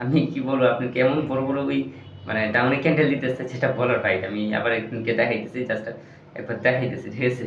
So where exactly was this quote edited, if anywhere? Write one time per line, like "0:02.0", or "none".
none